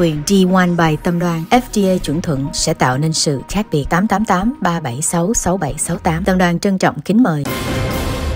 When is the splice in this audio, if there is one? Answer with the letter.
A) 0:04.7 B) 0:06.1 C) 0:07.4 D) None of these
C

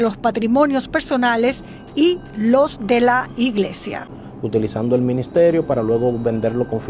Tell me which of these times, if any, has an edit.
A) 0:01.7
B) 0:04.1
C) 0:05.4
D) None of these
B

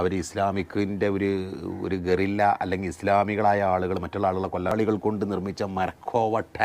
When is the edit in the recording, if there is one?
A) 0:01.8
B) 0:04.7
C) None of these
B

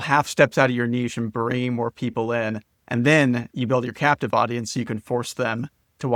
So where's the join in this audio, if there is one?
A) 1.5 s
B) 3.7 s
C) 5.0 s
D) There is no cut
D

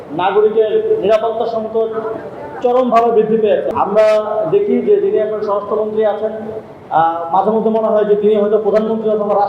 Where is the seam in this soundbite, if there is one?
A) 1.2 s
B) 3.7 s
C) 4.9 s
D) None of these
B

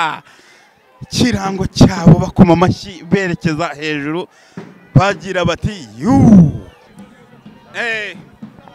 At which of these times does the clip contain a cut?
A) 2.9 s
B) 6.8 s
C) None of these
B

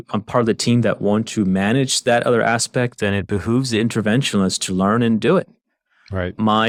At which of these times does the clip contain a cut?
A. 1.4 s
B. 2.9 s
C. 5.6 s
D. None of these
D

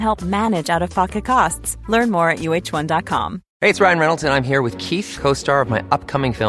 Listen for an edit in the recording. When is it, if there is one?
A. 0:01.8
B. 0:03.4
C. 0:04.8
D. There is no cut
B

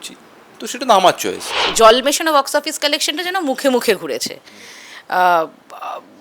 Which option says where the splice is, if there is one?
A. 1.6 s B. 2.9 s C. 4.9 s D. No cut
A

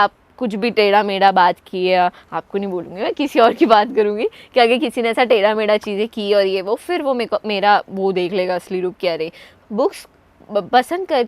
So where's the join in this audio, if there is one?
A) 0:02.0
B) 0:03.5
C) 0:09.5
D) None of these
C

